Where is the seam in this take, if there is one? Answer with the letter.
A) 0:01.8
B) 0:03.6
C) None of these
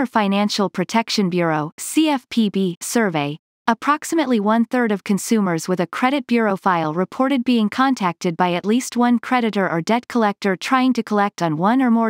C